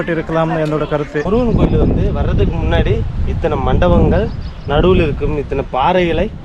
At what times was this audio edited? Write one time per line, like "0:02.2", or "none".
0:01.3